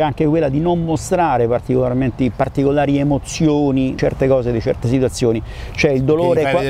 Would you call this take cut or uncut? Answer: uncut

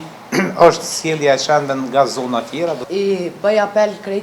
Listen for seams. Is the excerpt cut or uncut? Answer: cut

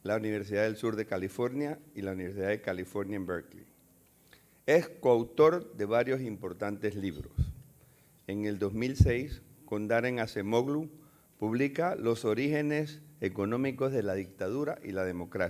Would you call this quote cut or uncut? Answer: cut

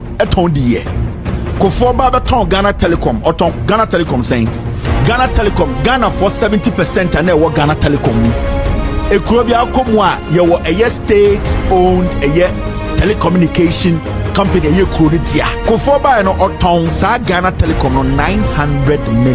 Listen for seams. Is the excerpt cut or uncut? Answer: uncut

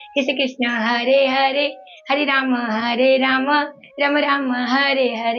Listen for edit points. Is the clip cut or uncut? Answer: uncut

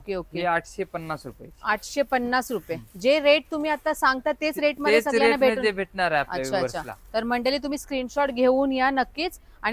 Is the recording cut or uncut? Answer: uncut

